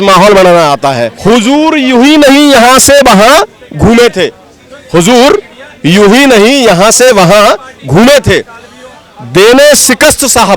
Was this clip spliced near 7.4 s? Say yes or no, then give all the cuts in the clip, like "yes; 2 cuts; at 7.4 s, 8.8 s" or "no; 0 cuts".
no; 1 cut; at 1.1 s